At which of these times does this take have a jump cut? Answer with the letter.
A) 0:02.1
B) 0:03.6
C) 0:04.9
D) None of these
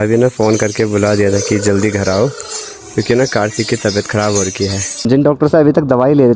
C